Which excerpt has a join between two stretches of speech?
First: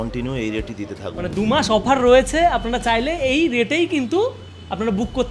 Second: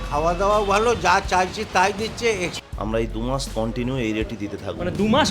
second; 1 cut; at 2.5 s

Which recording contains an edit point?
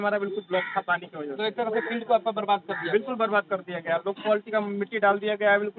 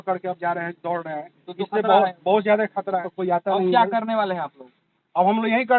second; 1 cut; at 3.1 s

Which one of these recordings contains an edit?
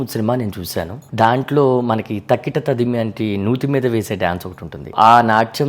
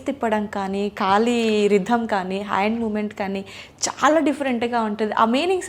first; 2 cuts; at 1.0 s, 4.9 s

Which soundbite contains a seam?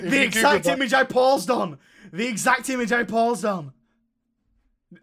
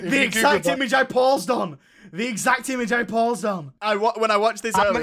second; 1 cut; at 3.7 s

